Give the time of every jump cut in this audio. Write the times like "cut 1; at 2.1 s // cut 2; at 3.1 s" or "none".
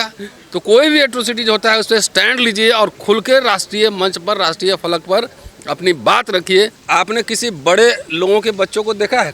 cut 1; at 6.8 s